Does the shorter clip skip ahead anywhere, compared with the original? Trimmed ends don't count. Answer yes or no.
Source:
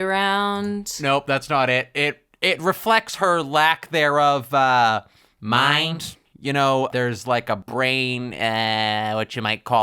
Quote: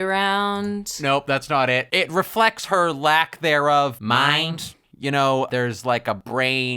yes